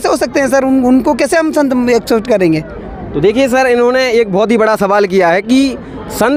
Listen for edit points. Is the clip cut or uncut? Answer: uncut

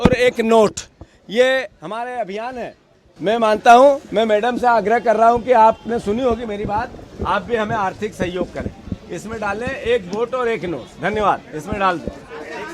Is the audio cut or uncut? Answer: uncut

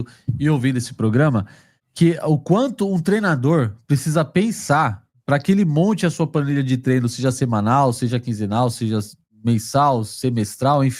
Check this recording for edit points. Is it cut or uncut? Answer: uncut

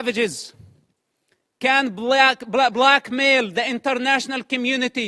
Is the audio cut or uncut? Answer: uncut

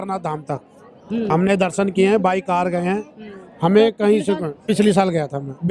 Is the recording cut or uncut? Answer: uncut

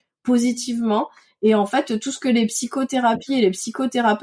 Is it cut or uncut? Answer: uncut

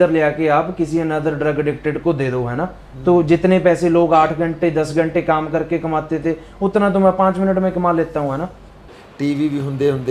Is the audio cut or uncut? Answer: cut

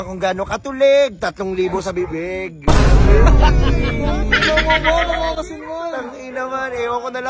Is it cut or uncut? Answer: uncut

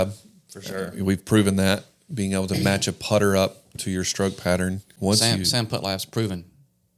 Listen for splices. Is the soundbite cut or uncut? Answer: cut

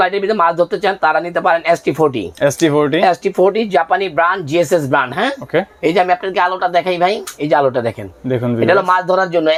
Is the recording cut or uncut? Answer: uncut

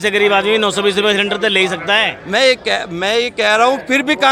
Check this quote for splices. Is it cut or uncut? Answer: uncut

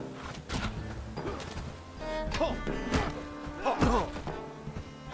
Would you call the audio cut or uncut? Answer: cut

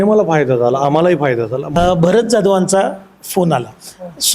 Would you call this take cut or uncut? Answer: cut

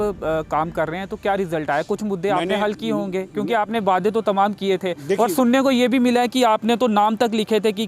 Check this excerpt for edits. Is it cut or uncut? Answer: uncut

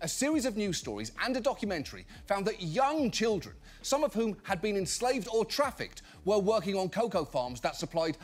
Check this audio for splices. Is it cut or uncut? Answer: uncut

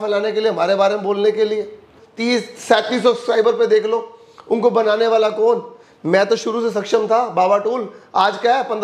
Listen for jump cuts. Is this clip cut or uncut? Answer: cut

